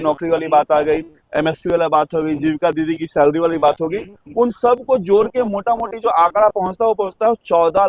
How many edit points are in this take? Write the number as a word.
zero